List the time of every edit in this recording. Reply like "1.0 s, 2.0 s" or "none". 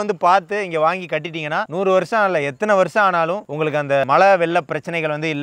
4.0 s